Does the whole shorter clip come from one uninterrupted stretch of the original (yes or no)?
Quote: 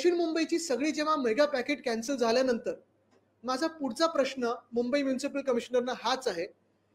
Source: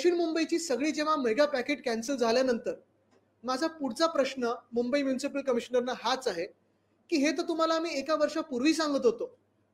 yes